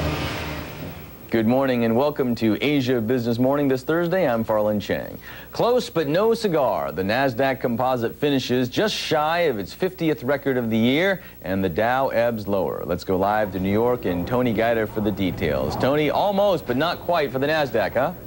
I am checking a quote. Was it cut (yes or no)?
no